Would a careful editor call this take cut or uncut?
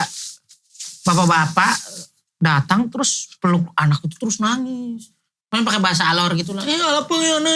uncut